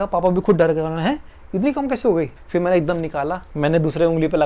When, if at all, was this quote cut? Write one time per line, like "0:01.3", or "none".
none